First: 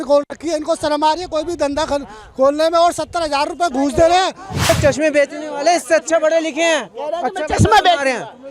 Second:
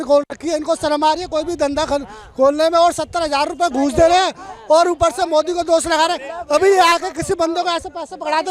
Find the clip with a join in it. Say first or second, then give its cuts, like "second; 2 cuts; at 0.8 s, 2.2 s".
first; 1 cut; at 4.6 s